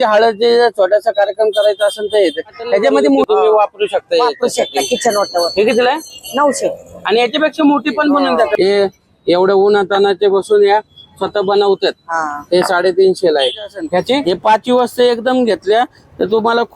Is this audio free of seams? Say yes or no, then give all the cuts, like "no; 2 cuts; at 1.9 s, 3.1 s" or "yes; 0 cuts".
no; 3 cuts; at 3.2 s, 8.5 s, 14.2 s